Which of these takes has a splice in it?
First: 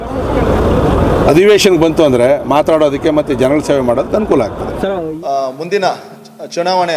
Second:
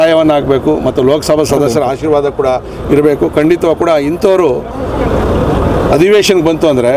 first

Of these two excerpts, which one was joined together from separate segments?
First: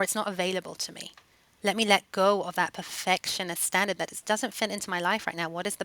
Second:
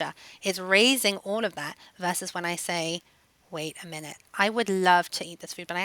first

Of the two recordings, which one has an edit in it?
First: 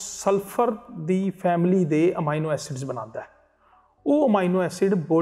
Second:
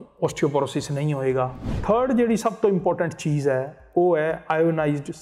second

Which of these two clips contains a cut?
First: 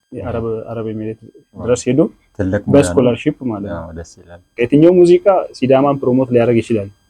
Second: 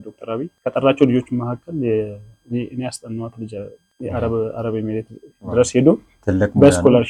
first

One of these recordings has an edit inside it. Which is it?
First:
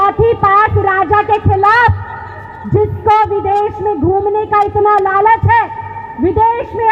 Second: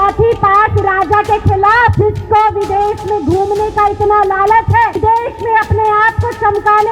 second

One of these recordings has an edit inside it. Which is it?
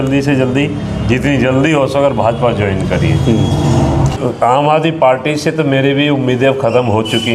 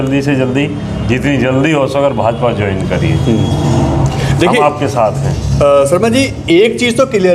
first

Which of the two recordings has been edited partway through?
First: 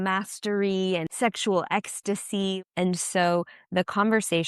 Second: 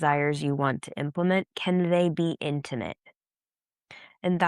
first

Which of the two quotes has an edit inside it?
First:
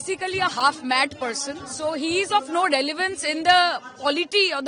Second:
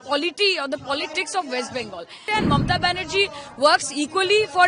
second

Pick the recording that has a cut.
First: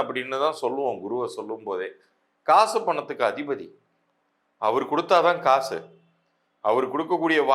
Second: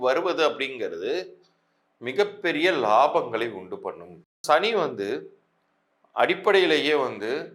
second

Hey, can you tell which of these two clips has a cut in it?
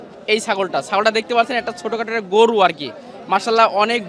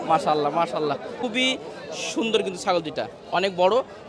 second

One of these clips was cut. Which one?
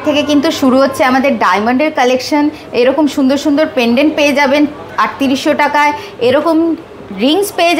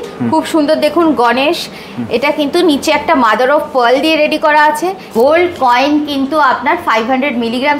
second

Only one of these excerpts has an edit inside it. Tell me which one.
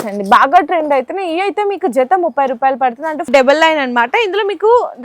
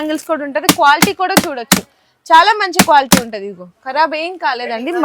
first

